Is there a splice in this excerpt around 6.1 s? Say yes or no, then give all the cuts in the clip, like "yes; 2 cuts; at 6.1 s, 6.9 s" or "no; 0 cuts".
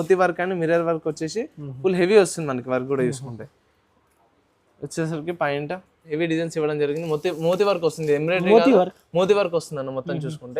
yes; 1 cut; at 6.1 s